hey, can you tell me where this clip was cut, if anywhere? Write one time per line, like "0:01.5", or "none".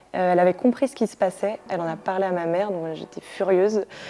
0:01.6